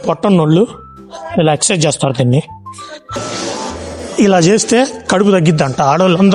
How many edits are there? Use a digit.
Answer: 1